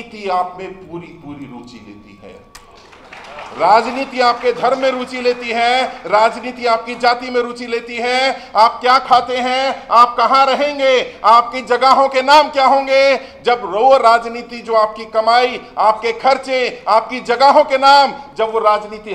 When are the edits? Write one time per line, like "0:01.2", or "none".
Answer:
none